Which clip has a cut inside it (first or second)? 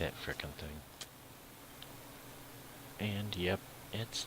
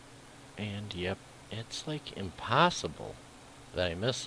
first